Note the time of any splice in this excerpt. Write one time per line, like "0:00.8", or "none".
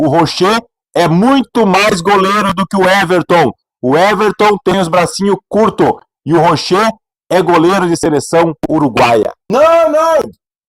0:09.4